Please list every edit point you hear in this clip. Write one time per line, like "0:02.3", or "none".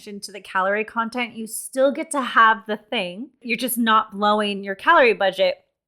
0:03.5